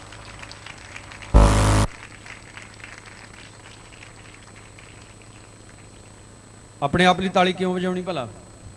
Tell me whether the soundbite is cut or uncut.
uncut